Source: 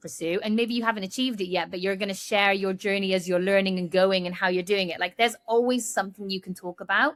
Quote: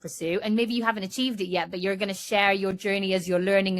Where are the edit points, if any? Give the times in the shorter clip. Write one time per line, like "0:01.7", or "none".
none